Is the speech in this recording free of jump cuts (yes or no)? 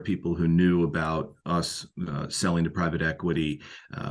yes